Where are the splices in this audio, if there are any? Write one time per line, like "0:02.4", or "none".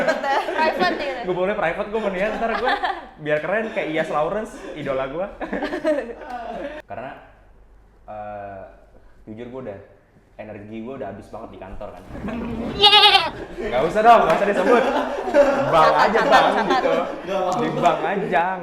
0:06.8